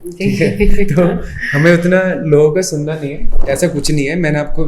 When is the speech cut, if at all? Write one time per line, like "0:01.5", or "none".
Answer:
0:03.3